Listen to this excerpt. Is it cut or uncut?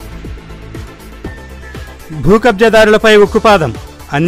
uncut